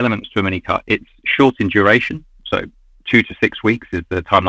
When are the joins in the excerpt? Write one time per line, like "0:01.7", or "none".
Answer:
none